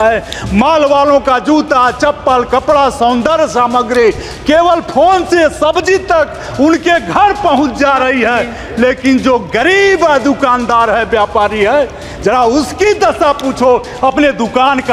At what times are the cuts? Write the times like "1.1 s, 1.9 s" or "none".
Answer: none